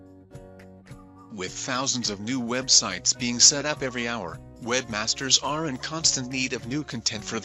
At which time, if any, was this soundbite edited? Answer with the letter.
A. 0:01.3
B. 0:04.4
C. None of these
A